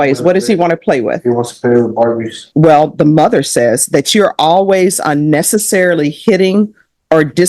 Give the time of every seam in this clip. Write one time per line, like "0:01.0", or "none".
0:02.4